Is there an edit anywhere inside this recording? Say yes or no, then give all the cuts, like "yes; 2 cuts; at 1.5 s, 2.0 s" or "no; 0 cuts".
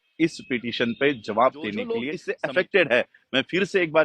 yes; 1 cut; at 2.1 s